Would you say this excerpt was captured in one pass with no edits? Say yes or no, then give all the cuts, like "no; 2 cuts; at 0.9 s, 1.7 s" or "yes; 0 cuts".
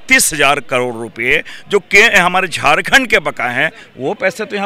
yes; 0 cuts